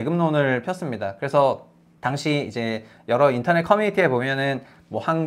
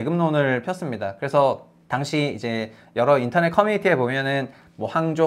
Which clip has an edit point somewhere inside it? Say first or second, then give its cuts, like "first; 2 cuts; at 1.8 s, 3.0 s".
second; 1 cut; at 1.7 s